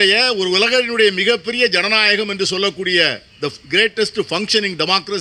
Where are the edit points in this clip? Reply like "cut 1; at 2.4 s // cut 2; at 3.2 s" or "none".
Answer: none